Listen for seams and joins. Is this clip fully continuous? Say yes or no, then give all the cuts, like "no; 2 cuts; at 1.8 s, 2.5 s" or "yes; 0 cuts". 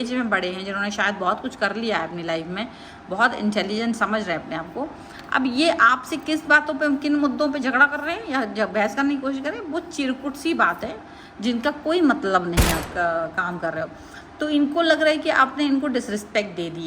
no; 1 cut; at 12.8 s